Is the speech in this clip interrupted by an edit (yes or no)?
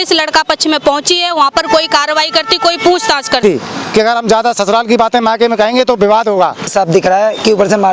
yes